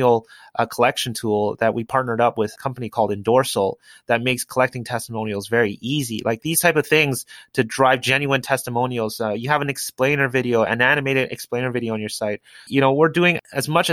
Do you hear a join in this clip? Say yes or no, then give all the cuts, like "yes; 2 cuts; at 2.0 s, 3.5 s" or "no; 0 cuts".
no; 0 cuts